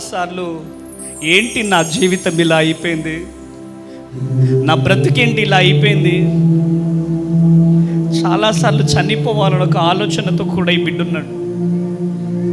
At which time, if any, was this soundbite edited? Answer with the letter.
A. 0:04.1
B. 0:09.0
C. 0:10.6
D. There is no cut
D